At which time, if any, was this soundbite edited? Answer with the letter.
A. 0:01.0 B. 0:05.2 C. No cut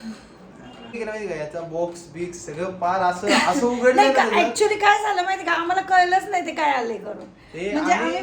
A